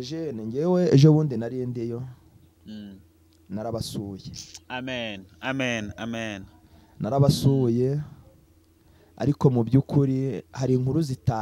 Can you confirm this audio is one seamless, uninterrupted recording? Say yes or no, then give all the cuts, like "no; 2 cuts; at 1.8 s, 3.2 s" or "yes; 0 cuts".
yes; 0 cuts